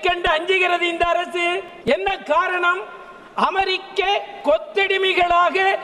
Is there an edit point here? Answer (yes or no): yes